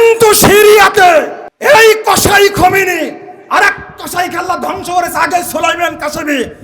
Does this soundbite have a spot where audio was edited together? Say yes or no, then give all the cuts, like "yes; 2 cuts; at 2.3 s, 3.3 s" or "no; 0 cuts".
yes; 1 cut; at 1.4 s